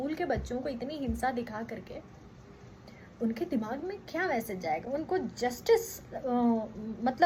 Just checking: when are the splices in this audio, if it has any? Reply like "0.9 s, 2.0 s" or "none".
none